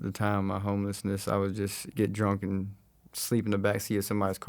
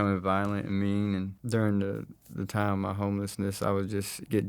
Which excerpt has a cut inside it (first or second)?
second